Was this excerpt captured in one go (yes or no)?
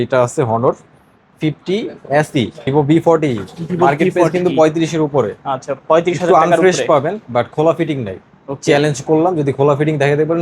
no